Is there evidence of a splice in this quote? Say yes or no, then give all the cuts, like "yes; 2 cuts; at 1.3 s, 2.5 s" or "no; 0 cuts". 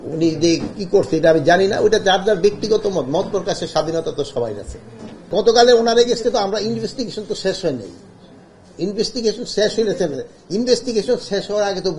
yes; 1 cut; at 5.3 s